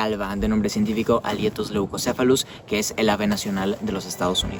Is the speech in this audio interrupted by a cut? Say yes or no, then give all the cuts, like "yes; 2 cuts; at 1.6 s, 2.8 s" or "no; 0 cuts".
no; 0 cuts